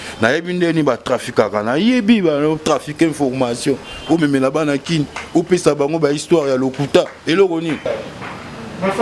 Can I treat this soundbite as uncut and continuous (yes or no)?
no